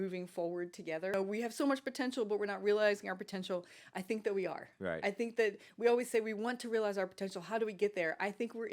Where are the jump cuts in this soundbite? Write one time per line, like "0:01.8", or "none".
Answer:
0:01.1